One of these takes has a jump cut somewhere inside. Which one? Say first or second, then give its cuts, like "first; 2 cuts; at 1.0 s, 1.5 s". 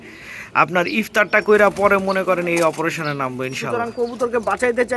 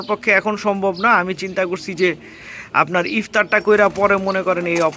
first; 1 cut; at 3.7 s